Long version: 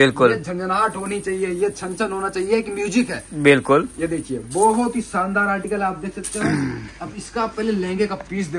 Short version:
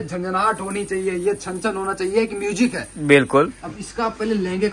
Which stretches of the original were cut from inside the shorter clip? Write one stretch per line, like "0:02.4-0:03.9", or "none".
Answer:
0:03.9-0:07.0